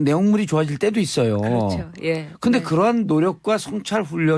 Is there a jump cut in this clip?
no; 0 cuts

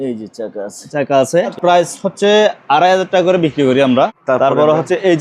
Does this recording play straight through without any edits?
no; 2 cuts; at 1.6 s, 4.2 s

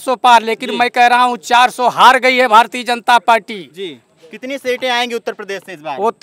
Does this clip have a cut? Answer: no; 0 cuts

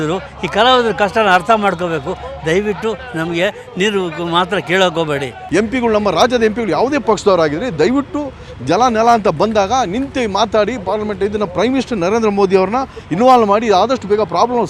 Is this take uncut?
no; 1 cut; at 5.3 s

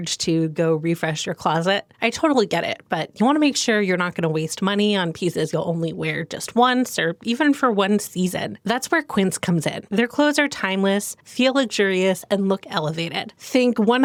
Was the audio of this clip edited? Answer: no; 0 cuts

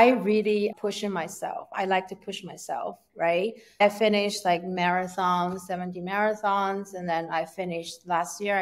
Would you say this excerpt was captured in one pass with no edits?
no; 2 cuts; at 0.7 s, 3.8 s

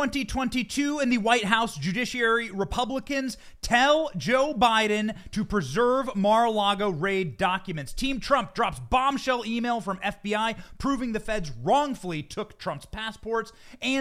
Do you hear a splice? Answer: no; 0 cuts

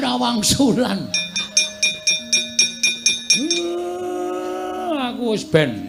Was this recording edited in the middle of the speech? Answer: no; 0 cuts

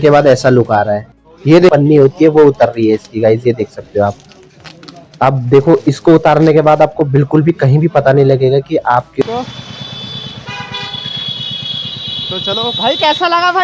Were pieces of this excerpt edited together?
yes; 2 cuts; at 1.7 s, 9.2 s

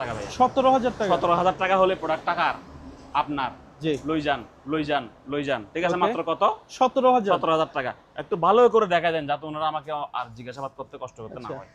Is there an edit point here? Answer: no; 0 cuts

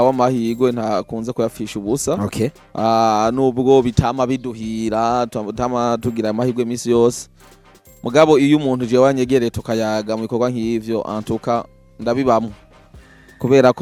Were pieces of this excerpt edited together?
no; 0 cuts

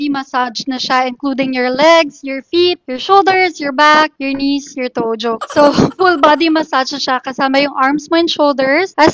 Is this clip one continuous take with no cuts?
yes; 0 cuts

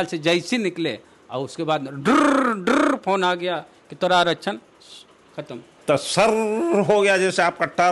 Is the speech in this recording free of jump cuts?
no; 1 cut; at 5.7 s

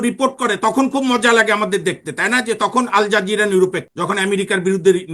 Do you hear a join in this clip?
yes; 1 cut; at 3.9 s

